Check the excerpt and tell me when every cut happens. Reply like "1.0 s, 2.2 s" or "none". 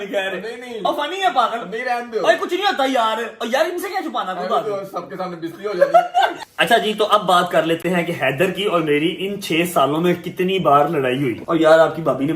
6.4 s, 11.4 s